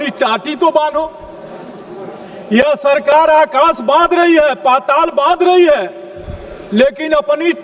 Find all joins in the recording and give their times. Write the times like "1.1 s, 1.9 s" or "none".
none